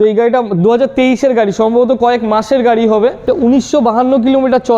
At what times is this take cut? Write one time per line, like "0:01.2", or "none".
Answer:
0:03.3